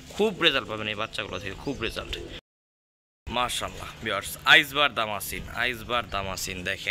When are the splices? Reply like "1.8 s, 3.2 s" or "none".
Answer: none